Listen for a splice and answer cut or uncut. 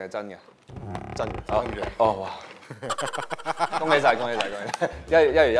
uncut